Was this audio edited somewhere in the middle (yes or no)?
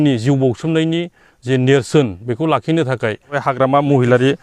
yes